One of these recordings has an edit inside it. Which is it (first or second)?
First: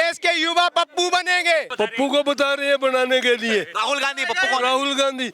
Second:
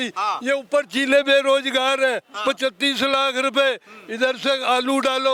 first